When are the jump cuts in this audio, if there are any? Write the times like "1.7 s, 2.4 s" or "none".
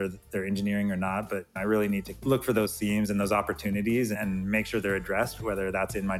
2.1 s